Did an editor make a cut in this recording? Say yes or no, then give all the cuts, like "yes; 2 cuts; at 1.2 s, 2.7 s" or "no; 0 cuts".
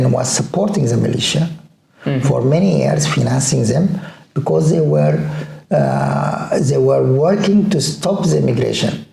no; 0 cuts